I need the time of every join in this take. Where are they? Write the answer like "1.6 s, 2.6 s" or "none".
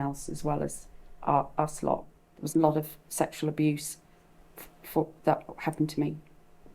2.2 s